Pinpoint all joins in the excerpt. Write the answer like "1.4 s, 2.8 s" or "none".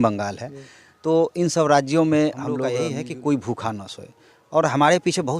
2.8 s